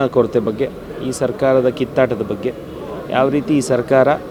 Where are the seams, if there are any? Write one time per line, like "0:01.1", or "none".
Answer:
none